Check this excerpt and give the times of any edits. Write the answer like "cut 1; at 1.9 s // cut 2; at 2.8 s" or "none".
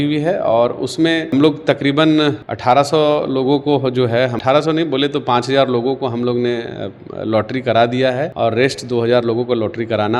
none